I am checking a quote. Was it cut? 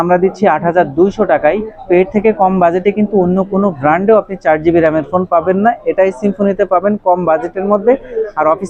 no; 0 cuts

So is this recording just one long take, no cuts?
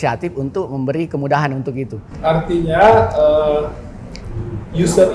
yes; 0 cuts

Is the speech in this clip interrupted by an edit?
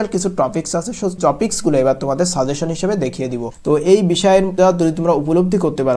yes; 3 cuts; at 1.2 s, 3.5 s, 4.5 s

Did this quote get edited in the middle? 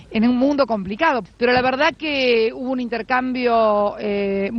yes; 1 cut; at 1.3 s

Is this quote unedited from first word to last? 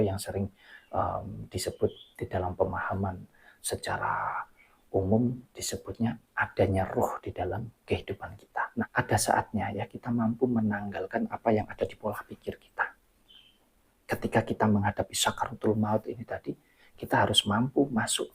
no; 1 cut; at 8.9 s

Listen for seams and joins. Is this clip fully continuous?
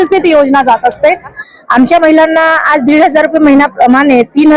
no; 1 cut; at 1.4 s

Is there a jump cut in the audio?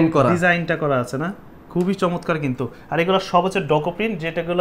no; 0 cuts

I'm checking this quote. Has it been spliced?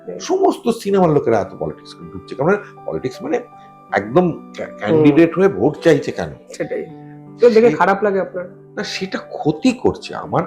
no; 0 cuts

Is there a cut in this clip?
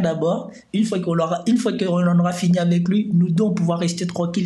no; 0 cuts

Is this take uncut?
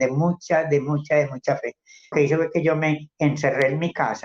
no; 1 cut; at 2.1 s

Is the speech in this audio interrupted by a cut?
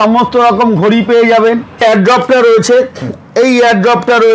yes; 1 cut; at 1.8 s

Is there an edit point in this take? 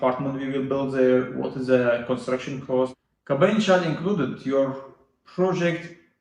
yes; 1 cut; at 3.0 s

